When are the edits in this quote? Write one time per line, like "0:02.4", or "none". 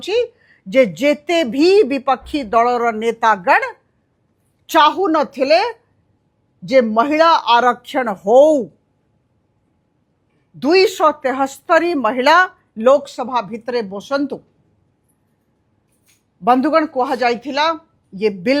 none